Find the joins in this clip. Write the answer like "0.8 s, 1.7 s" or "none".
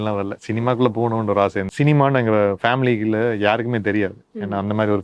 1.7 s

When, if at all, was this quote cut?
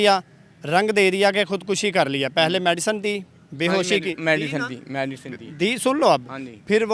none

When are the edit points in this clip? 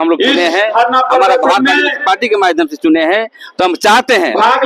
none

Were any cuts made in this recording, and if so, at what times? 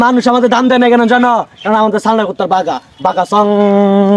none

